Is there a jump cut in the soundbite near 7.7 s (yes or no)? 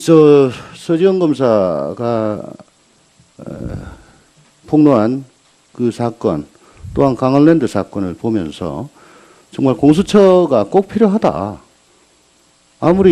yes